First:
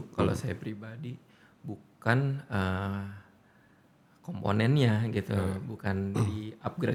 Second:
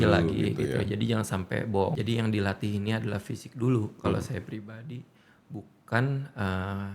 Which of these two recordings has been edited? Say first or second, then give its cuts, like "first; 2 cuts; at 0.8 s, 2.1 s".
second; 1 cut; at 1.9 s